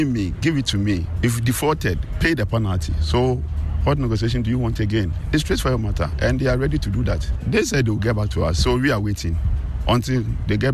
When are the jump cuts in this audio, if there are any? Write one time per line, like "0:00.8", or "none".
0:01.1
0:05.2
0:07.3